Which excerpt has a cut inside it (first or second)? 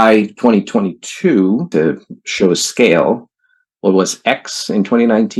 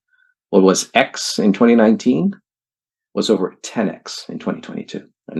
first